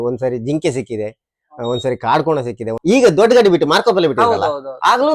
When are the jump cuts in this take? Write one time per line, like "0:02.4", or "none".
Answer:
0:02.7